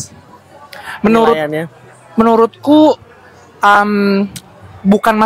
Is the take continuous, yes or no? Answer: yes